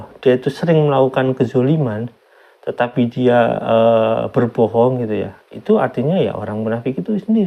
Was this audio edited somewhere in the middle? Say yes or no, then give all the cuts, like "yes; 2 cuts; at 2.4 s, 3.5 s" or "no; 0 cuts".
no; 0 cuts